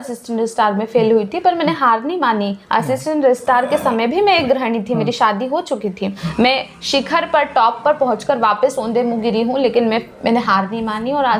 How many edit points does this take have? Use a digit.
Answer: 1